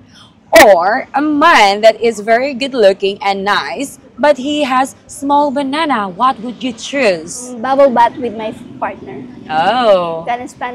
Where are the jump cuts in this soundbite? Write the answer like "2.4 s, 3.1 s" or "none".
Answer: 7.5 s